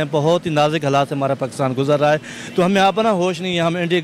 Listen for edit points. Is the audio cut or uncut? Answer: uncut